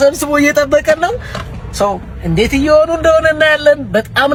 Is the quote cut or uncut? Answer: uncut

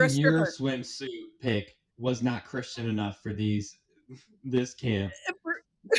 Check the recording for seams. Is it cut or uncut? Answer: uncut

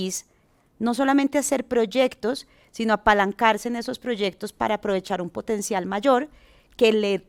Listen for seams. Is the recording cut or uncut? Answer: uncut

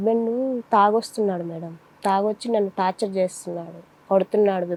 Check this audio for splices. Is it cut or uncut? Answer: uncut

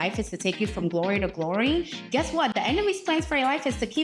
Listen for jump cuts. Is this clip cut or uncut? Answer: uncut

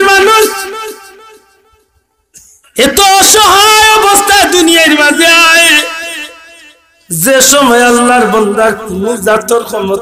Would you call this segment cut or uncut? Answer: uncut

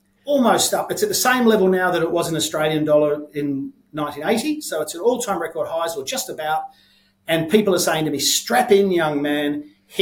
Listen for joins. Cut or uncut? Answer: uncut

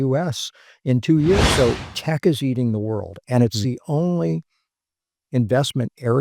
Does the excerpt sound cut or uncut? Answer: cut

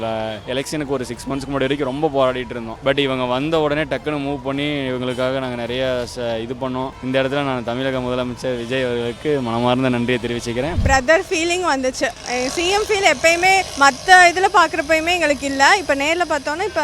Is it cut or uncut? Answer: cut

